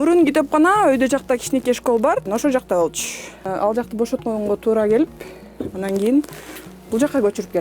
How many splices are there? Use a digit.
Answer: 2